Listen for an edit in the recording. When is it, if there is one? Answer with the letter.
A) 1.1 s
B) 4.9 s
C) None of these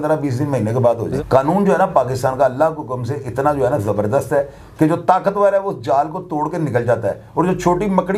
A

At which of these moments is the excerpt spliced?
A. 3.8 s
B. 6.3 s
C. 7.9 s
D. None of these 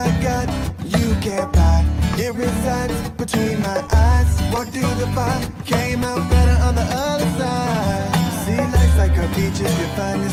D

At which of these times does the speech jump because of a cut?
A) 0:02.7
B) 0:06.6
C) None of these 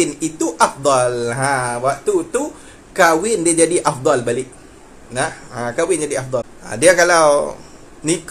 B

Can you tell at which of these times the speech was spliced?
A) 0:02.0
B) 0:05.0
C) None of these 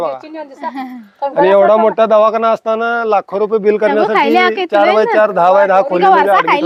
C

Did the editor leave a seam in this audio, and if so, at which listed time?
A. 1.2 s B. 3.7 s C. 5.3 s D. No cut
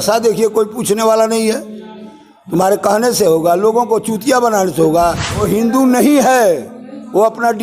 C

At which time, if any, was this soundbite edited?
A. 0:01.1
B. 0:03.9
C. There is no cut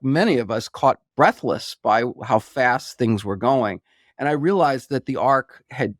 A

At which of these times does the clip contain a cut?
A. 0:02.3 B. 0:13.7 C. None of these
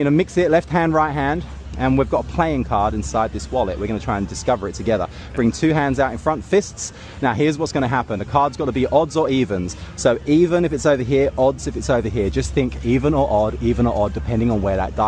A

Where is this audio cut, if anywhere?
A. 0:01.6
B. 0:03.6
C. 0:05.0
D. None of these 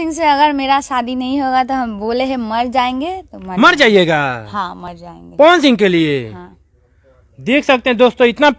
D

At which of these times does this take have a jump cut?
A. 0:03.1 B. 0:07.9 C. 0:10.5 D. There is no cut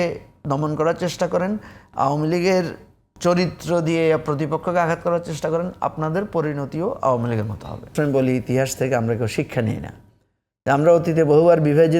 B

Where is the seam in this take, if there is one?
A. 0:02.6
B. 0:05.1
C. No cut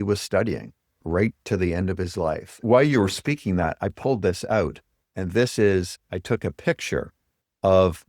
A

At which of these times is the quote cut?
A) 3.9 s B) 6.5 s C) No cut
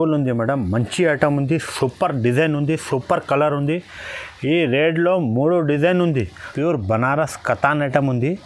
B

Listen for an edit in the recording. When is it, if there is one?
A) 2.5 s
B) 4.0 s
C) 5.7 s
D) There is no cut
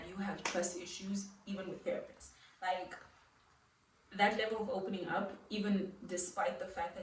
D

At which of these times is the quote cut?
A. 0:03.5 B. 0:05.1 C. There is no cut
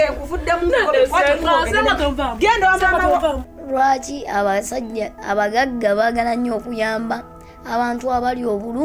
A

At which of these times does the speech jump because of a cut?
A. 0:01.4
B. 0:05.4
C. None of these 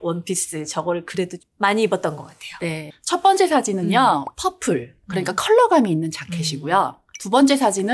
A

